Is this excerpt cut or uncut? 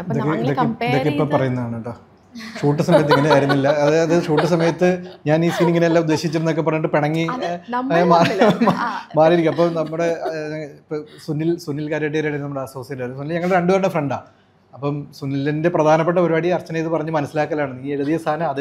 uncut